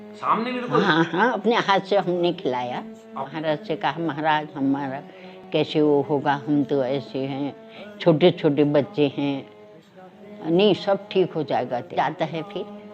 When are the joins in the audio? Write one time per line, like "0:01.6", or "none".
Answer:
0:03.3
0:12.0